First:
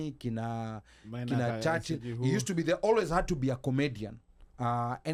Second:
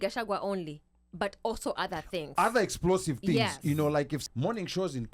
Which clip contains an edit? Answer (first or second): second